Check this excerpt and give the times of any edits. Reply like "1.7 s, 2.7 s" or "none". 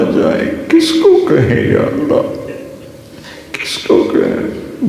none